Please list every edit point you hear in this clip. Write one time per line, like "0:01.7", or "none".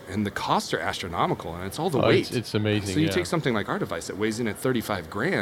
0:02.9